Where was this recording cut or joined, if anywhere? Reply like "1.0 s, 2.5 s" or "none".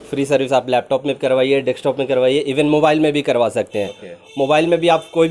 none